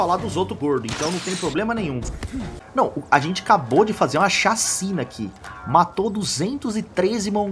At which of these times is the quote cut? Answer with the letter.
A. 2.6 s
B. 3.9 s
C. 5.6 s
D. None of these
A